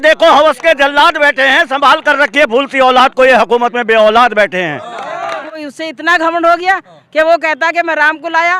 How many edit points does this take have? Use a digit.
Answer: 1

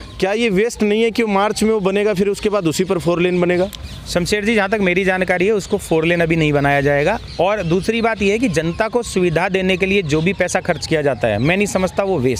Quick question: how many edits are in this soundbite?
0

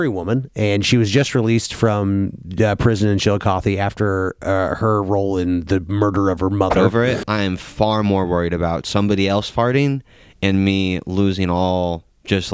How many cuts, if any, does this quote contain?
1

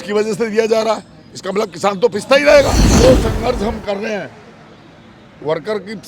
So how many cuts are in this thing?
1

